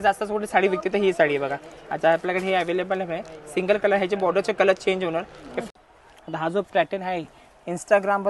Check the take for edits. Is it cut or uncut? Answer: cut